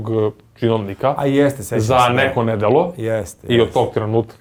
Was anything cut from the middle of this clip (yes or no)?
no